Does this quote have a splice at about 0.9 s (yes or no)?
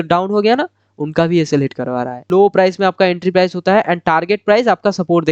no